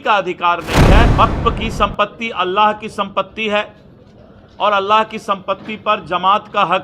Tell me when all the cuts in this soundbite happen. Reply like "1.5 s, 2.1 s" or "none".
1.1 s

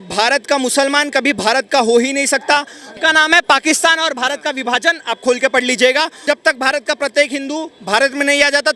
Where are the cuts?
2.9 s, 6.1 s

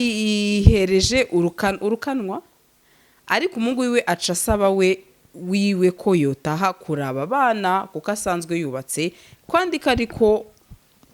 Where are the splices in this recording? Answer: none

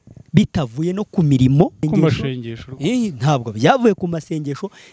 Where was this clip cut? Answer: 1.9 s

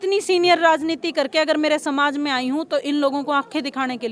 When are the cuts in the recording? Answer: none

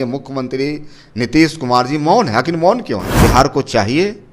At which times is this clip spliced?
3.1 s

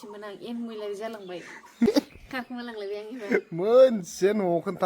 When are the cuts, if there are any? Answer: 1.9 s

